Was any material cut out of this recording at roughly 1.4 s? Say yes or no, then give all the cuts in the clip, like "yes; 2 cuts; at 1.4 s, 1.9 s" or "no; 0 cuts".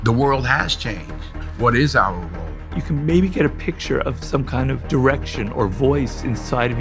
no; 1 cut; at 2.8 s